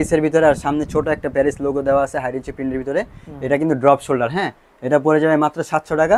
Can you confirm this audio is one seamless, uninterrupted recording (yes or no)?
yes